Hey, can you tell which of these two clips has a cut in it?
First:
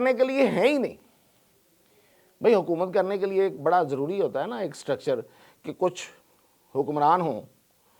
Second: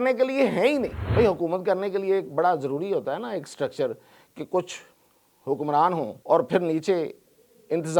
second; 2 cuts; at 1.0 s, 6.2 s

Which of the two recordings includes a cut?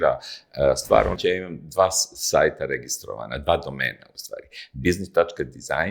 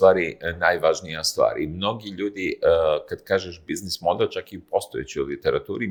first; 1 cut; at 1.2 s

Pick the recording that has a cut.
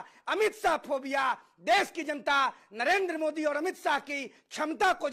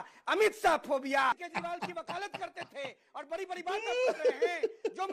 second; 1 cut; at 1.5 s

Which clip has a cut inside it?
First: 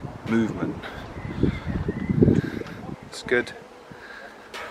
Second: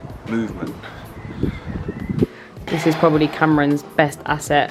second; 1 cut; at 2.3 s

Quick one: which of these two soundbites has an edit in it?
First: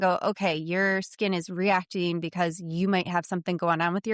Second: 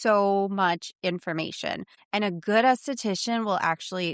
second; 1 cut; at 1.9 s

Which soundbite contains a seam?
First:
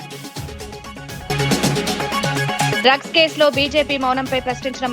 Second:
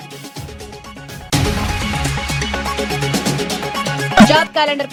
first; 2 cuts; at 1.3 s, 2.8 s

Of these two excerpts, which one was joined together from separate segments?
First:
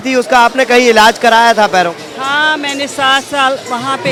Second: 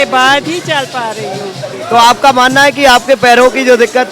second; 1 cut; at 1.7 s

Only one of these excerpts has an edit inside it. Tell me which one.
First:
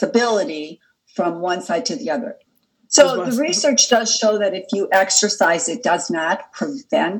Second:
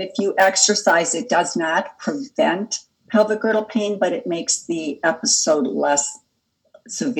first; 1 cut; at 2.4 s

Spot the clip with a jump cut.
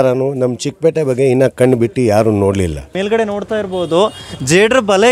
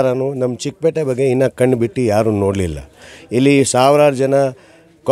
first; 1 cut; at 2.9 s

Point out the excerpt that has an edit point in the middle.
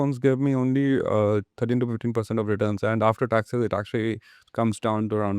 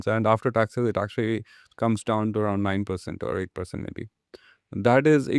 first; 1 cut; at 1.5 s

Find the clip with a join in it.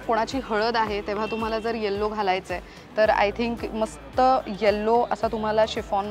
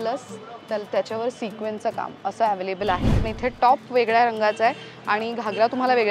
second; 1 cut; at 3.2 s

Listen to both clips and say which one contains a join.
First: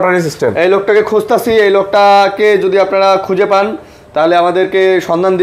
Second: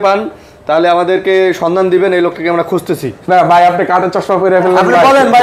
second; 1 cut; at 3.2 s

